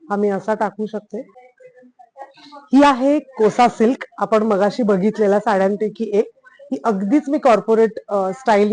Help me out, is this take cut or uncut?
cut